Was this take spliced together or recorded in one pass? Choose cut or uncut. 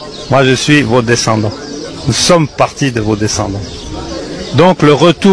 uncut